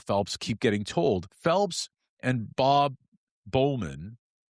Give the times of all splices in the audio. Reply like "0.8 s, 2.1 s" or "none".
1.3 s